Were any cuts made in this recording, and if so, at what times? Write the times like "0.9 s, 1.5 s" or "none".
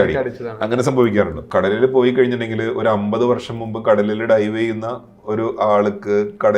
1.4 s